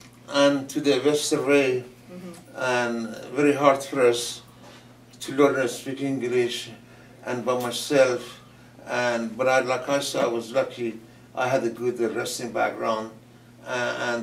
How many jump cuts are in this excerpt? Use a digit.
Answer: 1